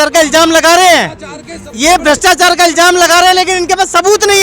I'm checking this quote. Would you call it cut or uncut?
uncut